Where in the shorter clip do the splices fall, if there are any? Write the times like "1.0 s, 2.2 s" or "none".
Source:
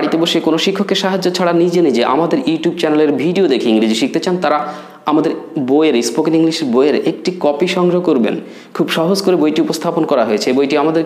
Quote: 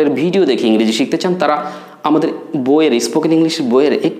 none